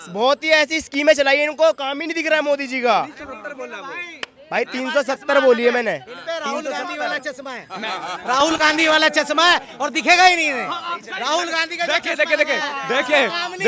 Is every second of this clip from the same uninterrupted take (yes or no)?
yes